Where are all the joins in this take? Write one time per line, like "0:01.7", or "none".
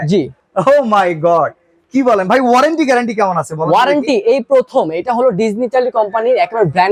none

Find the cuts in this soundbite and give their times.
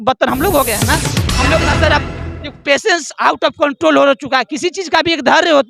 0:01.2

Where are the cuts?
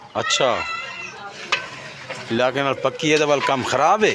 0:01.5

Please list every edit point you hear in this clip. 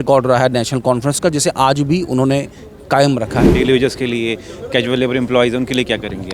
0:03.4

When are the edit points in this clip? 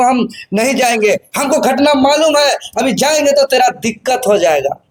none

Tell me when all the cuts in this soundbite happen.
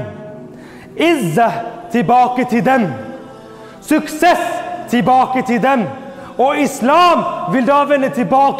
none

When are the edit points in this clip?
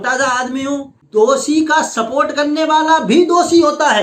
0:01.0

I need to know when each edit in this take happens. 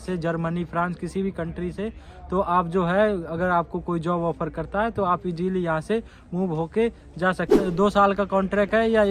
0:07.7

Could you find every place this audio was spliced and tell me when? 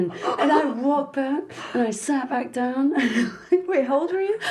none

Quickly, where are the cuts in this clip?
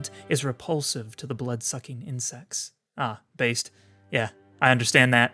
none

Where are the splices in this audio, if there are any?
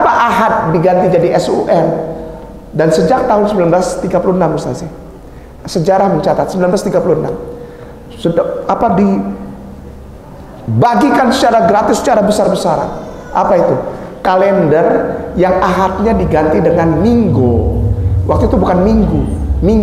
none

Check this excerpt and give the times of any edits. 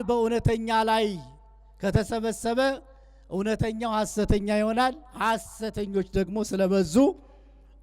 none

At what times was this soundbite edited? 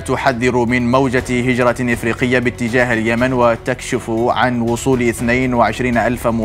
none

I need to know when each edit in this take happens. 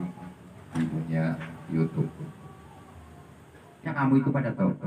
0:03.9

